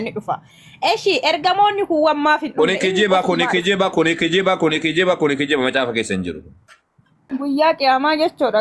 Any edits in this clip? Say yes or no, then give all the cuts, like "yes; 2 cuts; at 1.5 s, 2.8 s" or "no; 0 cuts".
yes; 1 cut; at 7.4 s